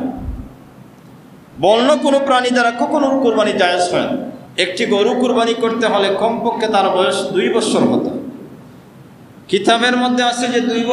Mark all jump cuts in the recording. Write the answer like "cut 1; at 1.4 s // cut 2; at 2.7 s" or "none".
cut 1; at 4.4 s